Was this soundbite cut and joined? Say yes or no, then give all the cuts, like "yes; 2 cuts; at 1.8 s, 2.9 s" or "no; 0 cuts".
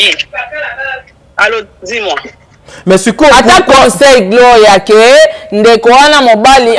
no; 0 cuts